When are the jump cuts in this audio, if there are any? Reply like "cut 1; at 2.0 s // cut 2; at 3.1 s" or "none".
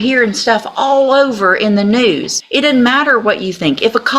cut 1; at 2.4 s